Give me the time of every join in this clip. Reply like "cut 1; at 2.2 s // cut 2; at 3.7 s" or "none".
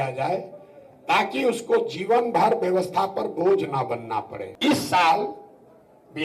cut 1; at 4.4 s